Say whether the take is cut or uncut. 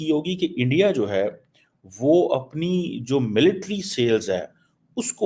uncut